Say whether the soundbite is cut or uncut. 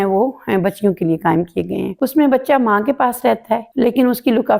cut